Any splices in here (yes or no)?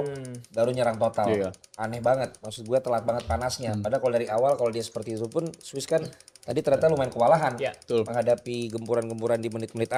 no